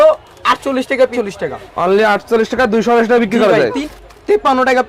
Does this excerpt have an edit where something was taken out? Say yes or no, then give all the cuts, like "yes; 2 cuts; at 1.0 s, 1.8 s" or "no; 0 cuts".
yes; 2 cuts; at 1.1 s, 3.9 s